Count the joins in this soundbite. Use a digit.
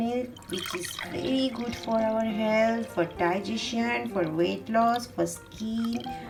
0